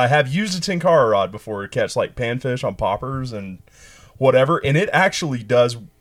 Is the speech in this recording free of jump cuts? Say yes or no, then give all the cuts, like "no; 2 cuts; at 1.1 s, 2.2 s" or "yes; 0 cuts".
yes; 0 cuts